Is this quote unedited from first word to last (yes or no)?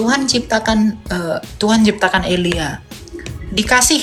yes